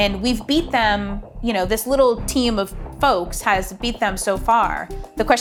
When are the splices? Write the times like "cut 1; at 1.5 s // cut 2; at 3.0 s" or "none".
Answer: none